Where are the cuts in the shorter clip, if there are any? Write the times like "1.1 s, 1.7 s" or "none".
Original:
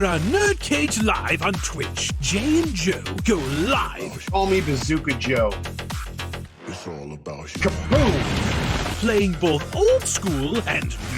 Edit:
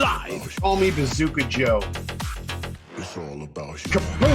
none

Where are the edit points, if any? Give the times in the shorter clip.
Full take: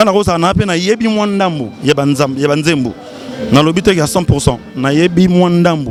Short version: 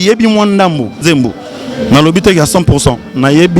1.0 s

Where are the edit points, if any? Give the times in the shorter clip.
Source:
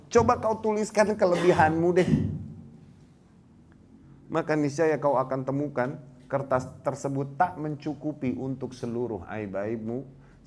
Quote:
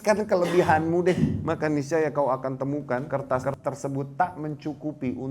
1.4 s, 3.1 s

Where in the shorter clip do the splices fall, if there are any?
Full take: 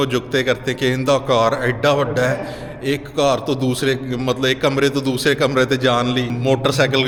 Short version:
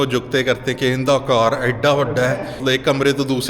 2.6 s

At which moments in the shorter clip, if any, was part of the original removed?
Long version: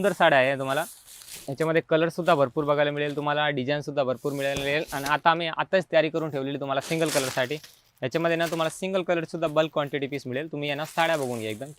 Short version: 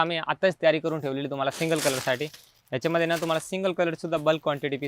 none

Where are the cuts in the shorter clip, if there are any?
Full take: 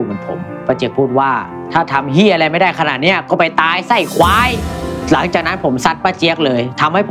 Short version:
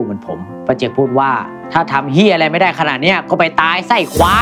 none

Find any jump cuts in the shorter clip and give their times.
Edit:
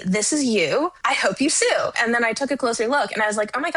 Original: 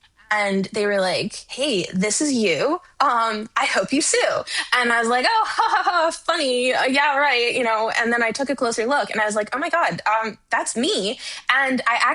1.0 s, 2.0 s

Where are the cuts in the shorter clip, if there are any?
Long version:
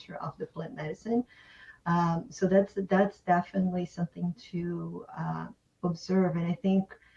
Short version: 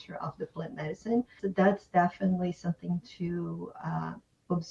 1.4 s

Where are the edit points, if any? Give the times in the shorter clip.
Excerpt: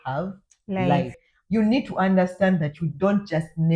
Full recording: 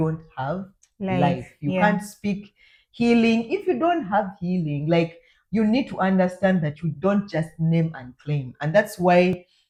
1.2 s

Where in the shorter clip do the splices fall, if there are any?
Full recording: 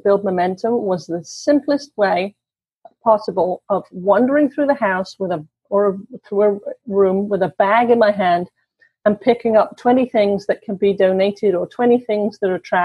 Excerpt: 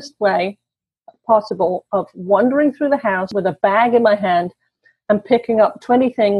3.3 s

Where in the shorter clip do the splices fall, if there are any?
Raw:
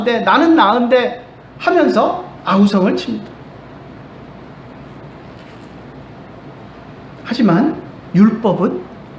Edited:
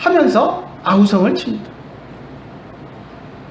2.1 s

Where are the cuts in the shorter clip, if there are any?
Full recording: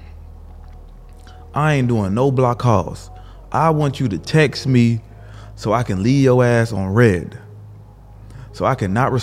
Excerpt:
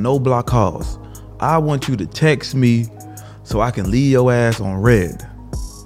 none

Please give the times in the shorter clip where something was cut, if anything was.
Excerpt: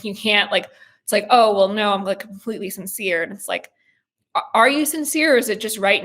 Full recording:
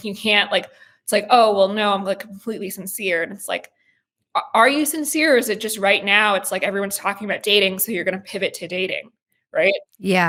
none

